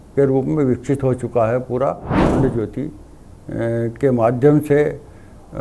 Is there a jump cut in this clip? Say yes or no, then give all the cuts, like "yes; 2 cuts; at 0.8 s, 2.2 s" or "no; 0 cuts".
yes; 1 cut; at 2.3 s